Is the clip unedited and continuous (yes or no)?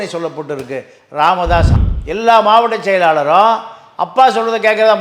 no